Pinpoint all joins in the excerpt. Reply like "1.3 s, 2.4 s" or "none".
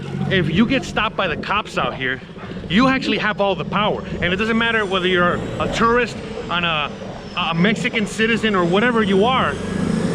none